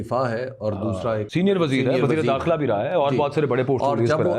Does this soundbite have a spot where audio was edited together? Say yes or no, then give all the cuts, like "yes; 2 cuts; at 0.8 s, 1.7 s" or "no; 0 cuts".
yes; 1 cut; at 1.3 s